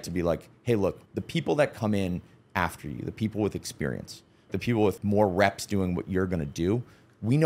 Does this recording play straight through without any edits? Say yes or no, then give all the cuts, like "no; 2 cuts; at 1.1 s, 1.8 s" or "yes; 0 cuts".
no; 2 cuts; at 1.1 s, 4.5 s